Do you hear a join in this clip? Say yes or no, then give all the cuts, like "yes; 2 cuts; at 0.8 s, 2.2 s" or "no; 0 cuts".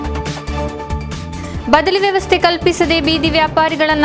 yes; 1 cut; at 1.1 s